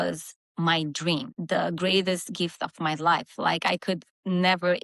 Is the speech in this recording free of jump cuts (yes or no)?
no